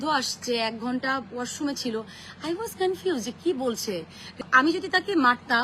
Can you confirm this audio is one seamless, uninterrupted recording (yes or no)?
no